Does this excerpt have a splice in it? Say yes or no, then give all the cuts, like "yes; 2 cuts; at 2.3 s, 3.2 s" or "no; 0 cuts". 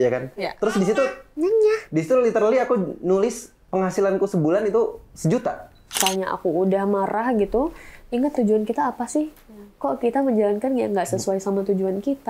yes; 1 cut; at 6.0 s